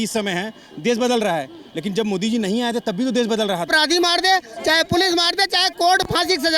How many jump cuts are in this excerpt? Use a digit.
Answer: 1